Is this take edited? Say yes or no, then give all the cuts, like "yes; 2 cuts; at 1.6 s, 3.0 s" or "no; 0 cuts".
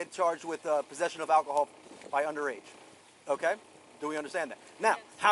no; 0 cuts